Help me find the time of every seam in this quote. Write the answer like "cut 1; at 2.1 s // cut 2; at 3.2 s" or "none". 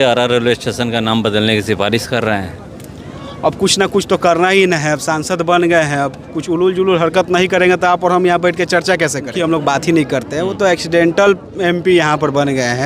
cut 1; at 9.3 s

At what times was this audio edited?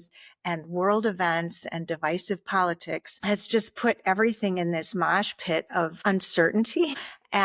cut 1; at 6.0 s

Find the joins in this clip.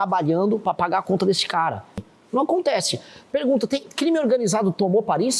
cut 1; at 2.0 s

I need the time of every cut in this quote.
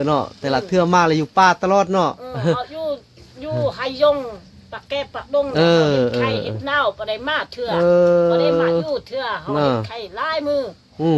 none

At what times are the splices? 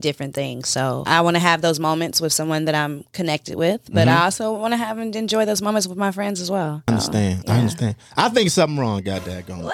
cut 1; at 1.0 s // cut 2; at 6.9 s

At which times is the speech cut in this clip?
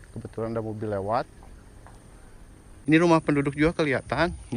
cut 1; at 2.7 s

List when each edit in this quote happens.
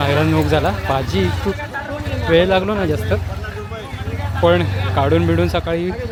none

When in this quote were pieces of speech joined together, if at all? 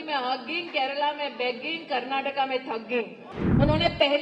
cut 1; at 3.2 s

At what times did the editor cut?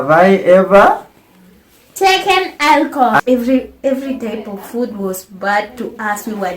cut 1; at 3.2 s

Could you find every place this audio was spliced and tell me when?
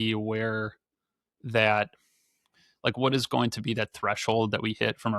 none

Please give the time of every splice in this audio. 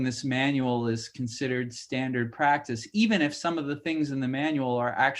none

